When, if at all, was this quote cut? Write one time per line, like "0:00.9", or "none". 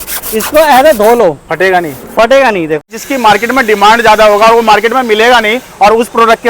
0:03.0